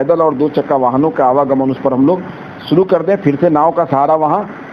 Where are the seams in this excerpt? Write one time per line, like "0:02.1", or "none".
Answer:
none

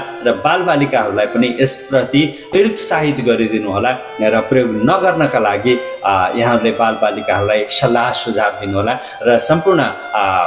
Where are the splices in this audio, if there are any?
0:02.5

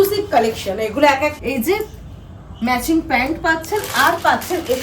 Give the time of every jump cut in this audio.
0:01.4

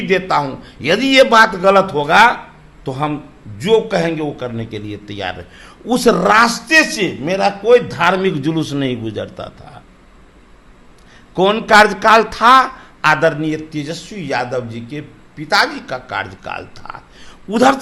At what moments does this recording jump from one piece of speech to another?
none

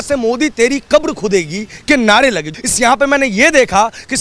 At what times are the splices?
0:02.4

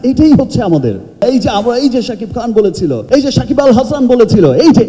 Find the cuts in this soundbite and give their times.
none

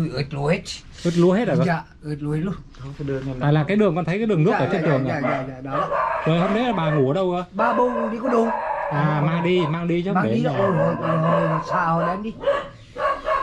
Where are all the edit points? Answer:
none

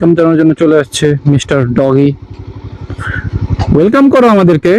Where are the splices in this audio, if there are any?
none

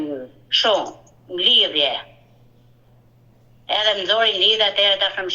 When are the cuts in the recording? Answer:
none

